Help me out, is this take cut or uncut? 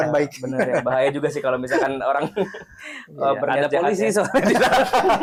uncut